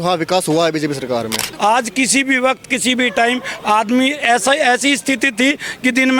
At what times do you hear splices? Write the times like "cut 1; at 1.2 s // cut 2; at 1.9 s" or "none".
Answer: cut 1; at 1.5 s